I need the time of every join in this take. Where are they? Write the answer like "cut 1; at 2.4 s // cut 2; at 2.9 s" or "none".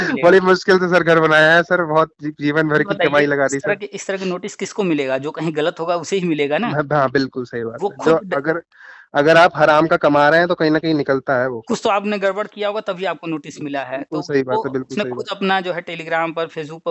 none